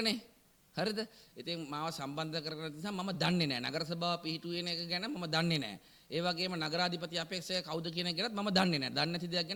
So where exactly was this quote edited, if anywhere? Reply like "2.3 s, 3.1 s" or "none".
none